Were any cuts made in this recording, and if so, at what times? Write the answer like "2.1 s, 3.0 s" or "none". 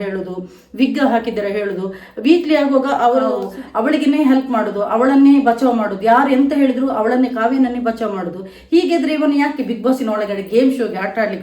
3.4 s